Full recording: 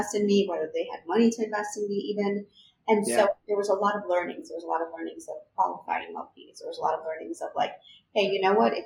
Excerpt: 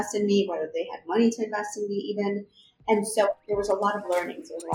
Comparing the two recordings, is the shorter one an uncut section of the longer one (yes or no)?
yes